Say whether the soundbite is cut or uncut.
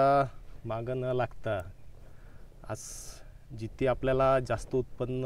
uncut